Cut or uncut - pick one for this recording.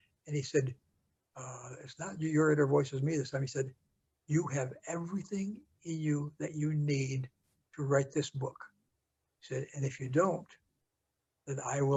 uncut